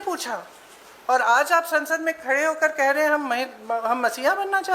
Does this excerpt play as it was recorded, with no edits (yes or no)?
yes